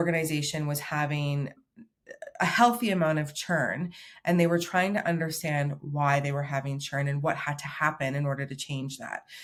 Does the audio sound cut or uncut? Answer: uncut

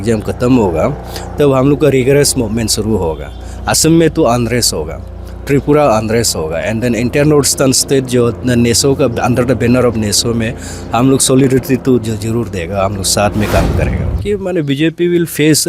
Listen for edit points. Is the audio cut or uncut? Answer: cut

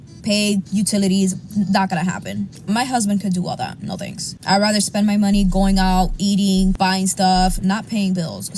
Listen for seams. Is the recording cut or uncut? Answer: uncut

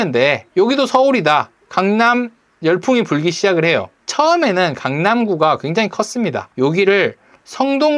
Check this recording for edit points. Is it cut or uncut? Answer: cut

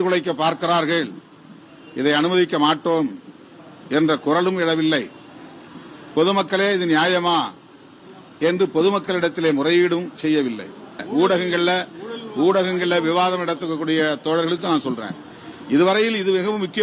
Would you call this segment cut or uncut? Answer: cut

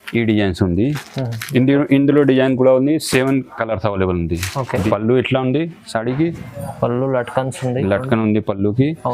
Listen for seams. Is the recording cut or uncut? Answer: cut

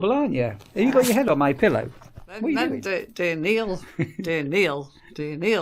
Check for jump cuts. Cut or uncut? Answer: cut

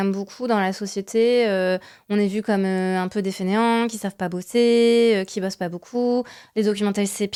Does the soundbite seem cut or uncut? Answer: uncut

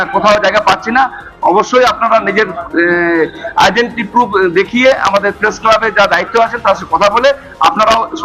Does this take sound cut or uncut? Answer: uncut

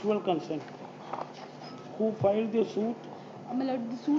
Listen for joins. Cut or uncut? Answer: cut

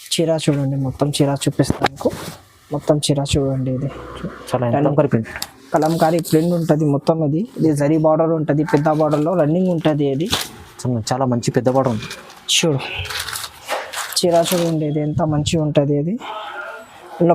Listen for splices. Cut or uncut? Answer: cut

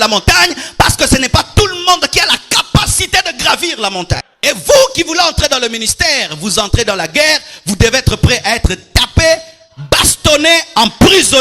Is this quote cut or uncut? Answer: cut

